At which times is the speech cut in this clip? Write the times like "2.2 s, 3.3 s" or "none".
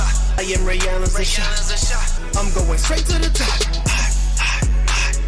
none